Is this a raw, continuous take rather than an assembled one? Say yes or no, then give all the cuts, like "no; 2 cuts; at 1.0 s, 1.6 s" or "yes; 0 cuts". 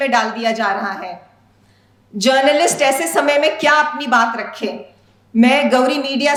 yes; 0 cuts